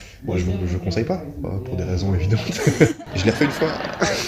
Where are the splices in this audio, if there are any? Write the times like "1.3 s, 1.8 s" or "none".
2.9 s